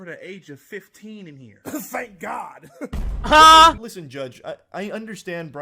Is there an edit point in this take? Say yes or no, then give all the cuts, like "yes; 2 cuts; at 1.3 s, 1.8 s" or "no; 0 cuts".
yes; 1 cut; at 3.7 s